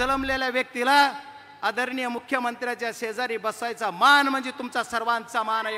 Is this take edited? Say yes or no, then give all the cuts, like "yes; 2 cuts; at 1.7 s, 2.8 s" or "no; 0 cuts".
no; 0 cuts